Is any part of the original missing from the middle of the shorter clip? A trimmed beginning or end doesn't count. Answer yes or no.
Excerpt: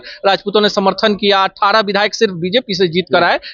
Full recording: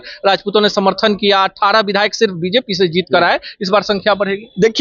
no